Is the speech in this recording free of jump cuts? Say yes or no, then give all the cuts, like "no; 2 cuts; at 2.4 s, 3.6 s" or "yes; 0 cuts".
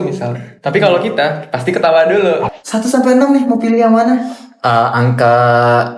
no; 1 cut; at 2.5 s